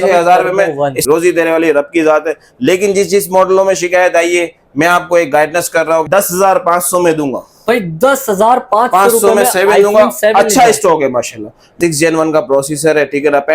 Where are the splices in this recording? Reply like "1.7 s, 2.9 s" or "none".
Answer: 1.0 s, 6.1 s, 11.6 s

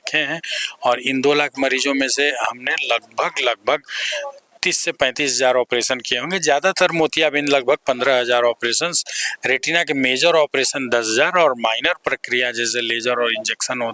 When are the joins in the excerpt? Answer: none

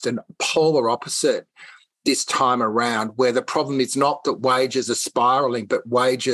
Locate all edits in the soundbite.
none

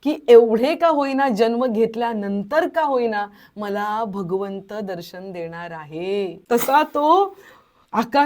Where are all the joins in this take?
6.3 s

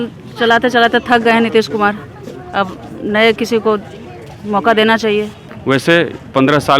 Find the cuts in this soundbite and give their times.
5.4 s

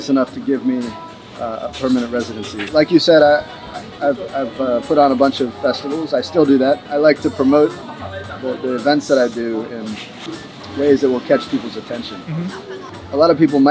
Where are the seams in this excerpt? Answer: none

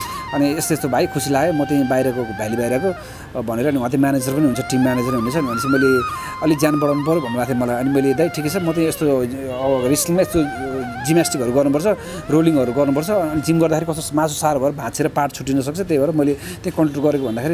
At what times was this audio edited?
none

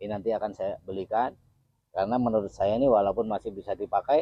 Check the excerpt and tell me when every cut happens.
none

